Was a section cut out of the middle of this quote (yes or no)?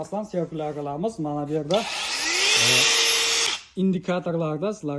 no